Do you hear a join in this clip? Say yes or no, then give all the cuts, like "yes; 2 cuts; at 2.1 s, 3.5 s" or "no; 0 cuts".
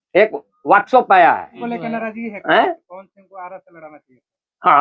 yes; 1 cut; at 1.6 s